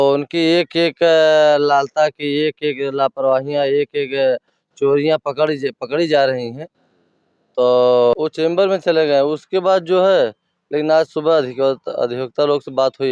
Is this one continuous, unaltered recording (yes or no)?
no